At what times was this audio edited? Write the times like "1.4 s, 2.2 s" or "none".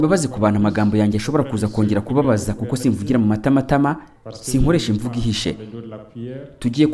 none

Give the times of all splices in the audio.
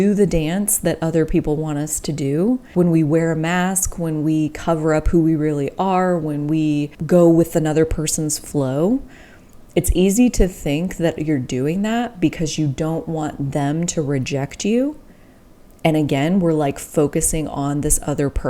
2.7 s, 6.9 s

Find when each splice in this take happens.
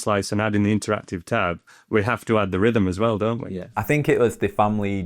3.7 s

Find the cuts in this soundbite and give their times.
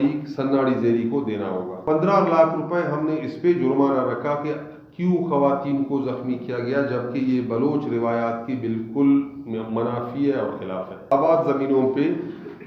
1.8 s, 11.1 s

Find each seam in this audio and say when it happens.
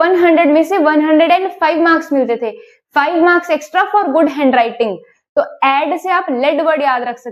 none

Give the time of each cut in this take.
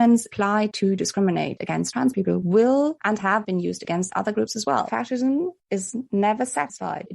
4.9 s

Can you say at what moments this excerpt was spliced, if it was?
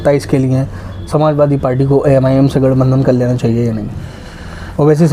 none

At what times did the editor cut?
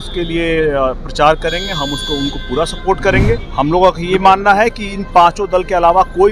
3.5 s

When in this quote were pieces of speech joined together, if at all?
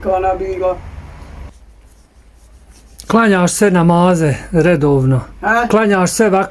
1.5 s

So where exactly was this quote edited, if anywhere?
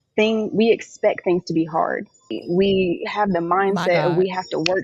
2.4 s

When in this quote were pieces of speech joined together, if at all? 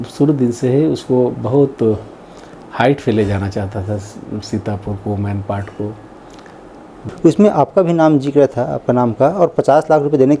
7.0 s

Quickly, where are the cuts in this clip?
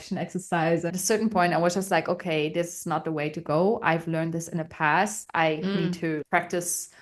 0.9 s

